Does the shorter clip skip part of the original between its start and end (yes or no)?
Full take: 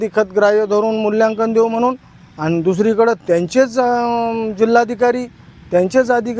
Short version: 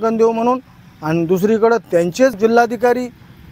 yes